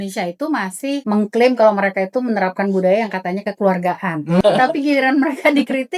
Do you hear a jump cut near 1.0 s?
yes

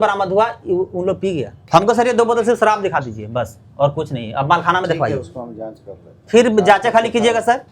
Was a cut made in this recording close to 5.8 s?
no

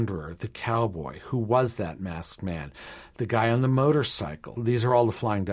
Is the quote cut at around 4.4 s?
yes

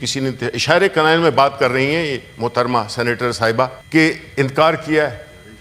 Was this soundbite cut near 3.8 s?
yes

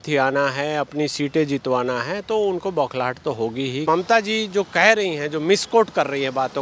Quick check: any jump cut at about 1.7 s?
no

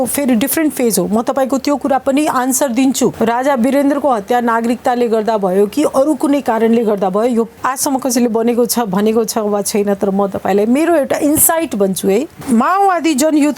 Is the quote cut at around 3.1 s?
yes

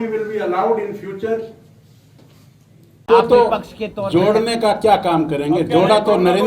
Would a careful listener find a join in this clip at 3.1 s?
yes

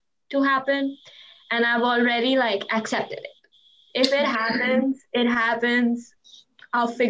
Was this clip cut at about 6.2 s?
yes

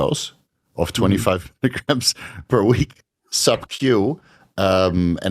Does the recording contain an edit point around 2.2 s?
no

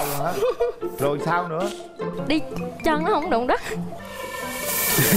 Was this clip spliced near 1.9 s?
no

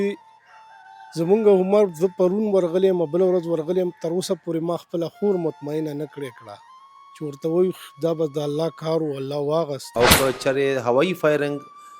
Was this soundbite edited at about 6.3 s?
no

